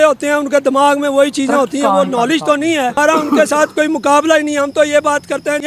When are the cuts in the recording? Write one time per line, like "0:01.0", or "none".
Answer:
0:03.0